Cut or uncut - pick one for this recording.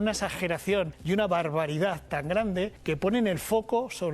cut